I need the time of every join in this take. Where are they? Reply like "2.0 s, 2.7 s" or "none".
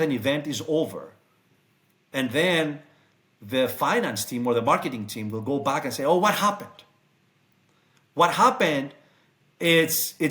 none